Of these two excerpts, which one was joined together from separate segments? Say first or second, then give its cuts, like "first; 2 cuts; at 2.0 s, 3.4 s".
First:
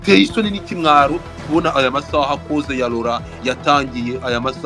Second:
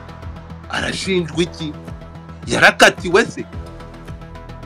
second; 1 cut; at 3.4 s